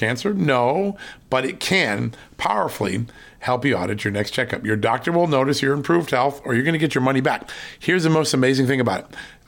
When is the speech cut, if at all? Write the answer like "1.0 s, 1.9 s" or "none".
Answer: none